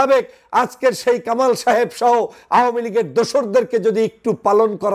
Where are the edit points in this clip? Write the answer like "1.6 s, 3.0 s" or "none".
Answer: none